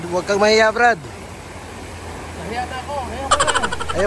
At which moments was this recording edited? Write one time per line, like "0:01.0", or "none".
none